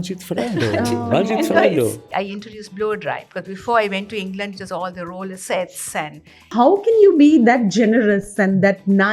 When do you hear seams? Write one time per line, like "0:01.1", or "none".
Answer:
0:02.1
0:06.5

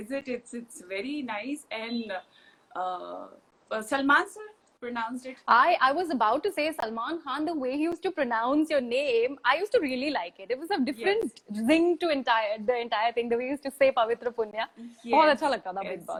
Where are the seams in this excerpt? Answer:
none

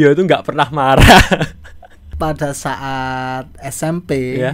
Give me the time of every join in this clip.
0:02.1

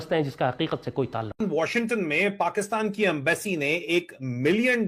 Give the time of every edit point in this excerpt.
0:01.4

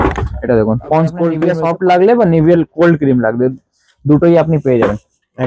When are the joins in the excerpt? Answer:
0:01.5

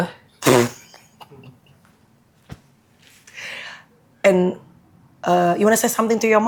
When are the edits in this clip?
none

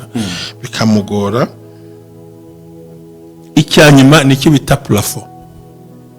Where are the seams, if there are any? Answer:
0:01.5
0:03.4

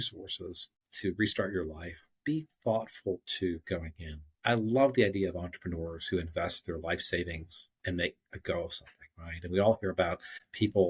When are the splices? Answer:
0:02.1
0:04.3

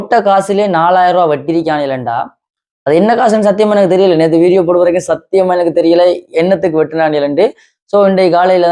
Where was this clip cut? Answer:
none

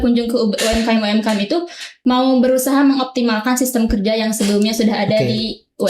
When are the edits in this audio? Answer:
0:01.8

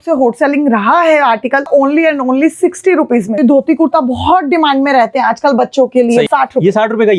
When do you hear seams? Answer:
0:01.7
0:03.4
0:06.3

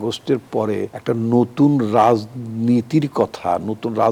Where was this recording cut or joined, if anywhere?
none

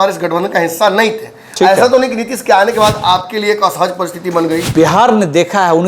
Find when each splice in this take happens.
0:04.7

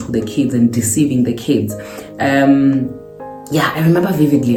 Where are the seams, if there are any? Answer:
none

